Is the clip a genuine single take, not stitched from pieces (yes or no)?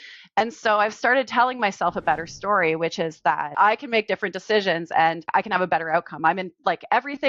no